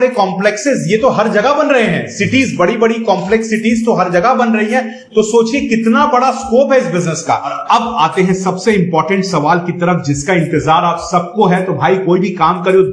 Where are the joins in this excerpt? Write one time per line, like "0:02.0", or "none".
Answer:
0:07.6